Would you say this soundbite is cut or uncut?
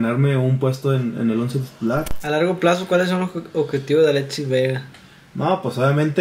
cut